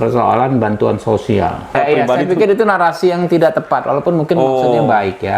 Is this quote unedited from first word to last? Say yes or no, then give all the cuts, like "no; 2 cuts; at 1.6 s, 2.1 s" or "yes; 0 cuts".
no; 1 cut; at 1.7 s